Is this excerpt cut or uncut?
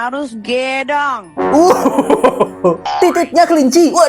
cut